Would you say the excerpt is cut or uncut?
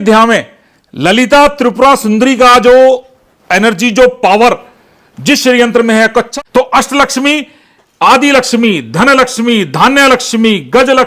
cut